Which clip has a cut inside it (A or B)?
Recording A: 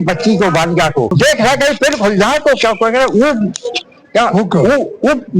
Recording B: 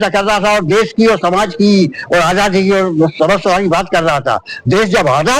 A